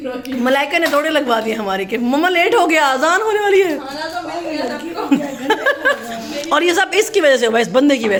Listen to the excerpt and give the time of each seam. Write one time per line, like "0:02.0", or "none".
none